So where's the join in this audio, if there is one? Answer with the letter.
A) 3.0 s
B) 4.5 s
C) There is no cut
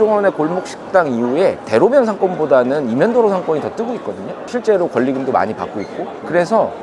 C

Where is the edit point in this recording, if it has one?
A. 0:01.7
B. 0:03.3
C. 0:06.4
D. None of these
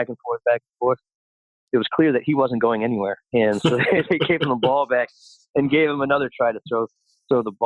A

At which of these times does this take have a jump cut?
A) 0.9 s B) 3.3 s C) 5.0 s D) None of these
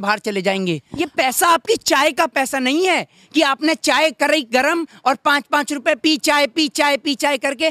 A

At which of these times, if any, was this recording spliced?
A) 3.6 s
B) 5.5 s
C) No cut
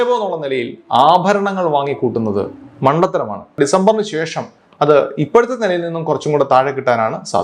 A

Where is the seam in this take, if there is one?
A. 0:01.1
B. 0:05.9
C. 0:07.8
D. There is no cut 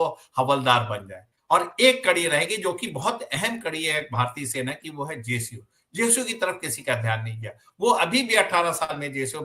D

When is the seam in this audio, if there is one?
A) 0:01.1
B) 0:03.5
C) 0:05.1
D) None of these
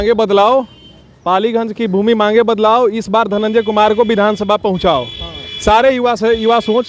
D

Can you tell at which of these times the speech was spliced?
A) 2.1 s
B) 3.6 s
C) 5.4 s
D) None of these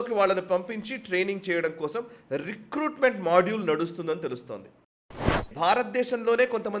C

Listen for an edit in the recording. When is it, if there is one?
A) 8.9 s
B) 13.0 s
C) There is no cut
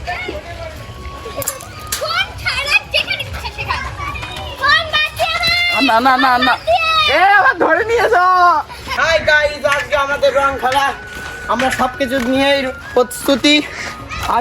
A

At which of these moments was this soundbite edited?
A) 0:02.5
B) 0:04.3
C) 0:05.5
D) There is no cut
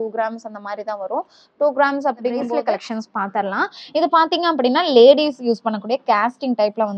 A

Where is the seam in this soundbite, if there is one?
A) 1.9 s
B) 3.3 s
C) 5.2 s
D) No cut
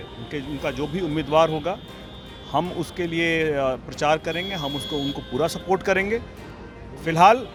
D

